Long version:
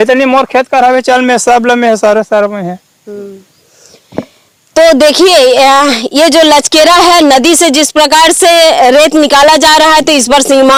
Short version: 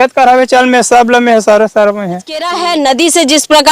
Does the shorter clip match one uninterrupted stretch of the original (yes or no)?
no